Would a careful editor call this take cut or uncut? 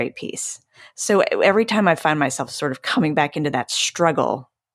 uncut